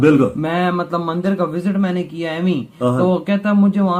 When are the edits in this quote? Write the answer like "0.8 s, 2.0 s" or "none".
none